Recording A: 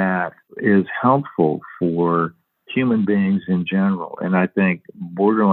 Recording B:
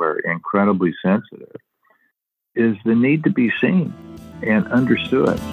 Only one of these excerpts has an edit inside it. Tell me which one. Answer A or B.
B